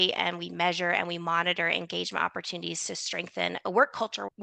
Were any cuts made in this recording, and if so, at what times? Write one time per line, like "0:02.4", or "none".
none